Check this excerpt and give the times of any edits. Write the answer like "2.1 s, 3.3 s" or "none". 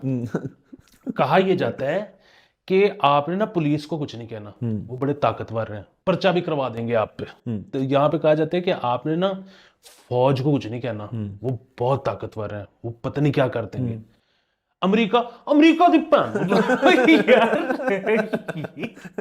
5.9 s, 7.7 s